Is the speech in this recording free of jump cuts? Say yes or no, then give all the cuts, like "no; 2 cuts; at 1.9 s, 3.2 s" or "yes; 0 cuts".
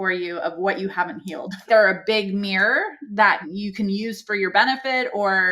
no; 2 cuts; at 1.6 s, 3.5 s